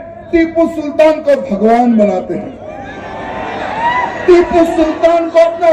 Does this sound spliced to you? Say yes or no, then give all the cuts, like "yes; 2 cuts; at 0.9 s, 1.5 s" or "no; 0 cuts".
no; 0 cuts